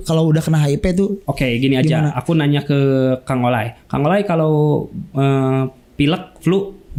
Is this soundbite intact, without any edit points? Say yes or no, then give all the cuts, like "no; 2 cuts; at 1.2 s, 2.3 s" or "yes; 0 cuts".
yes; 0 cuts